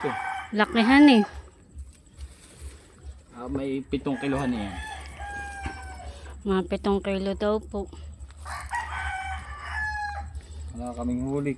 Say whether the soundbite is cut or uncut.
uncut